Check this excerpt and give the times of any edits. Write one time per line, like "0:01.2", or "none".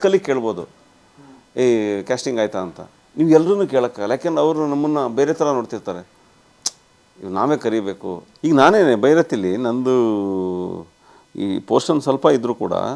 0:08.2